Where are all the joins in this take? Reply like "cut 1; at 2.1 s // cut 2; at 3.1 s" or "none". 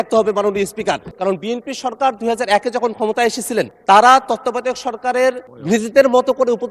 cut 1; at 1.1 s // cut 2; at 3.7 s